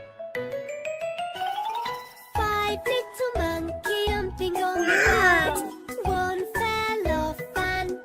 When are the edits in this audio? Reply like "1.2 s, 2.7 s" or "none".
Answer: 4.1 s